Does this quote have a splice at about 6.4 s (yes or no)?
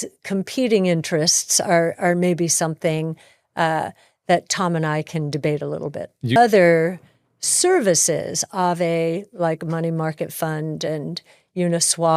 yes